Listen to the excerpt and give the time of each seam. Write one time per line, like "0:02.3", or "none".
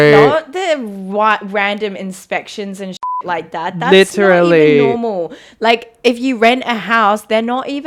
none